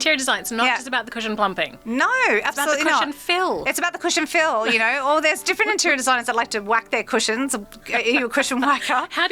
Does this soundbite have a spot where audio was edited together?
no; 0 cuts

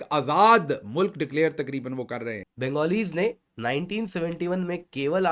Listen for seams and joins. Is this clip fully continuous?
no; 1 cut; at 2.4 s

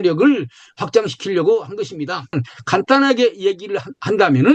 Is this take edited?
yes; 1 cut; at 2.5 s

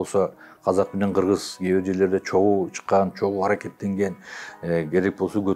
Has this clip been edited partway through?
no; 0 cuts

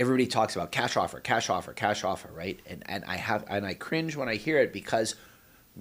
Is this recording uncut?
yes; 0 cuts

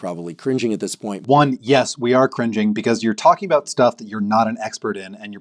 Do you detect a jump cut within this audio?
yes; 1 cut; at 1.2 s

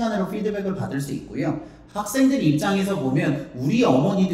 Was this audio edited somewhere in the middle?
no; 0 cuts

